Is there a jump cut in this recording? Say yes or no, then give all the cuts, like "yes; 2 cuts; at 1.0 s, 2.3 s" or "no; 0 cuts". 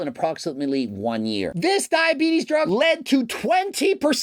yes; 2 cuts; at 1.5 s, 2.7 s